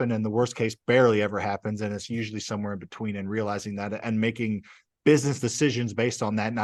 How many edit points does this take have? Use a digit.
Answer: 0